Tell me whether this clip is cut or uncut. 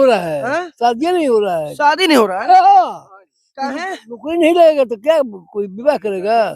uncut